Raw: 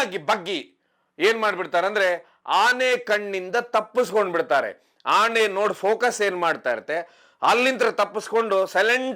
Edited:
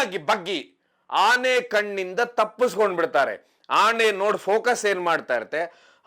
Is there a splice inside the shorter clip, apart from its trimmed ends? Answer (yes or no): yes